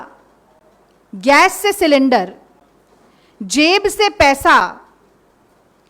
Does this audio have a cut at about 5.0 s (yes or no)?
no